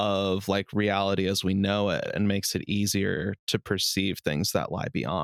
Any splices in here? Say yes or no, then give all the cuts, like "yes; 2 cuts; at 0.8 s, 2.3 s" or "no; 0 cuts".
no; 0 cuts